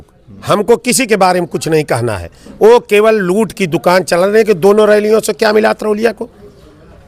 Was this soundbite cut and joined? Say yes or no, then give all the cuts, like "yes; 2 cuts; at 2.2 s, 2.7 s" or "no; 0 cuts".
no; 0 cuts